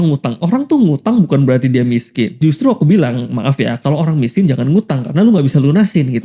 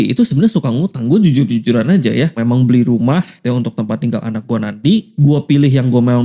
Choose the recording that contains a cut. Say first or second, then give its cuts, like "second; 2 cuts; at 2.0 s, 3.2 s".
second; 3 cuts; at 2.4 s, 3.3 s, 5.1 s